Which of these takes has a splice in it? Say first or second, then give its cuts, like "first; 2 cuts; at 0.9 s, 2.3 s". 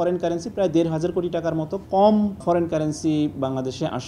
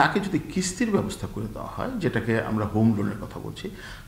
first; 2 cuts; at 1.8 s, 2.4 s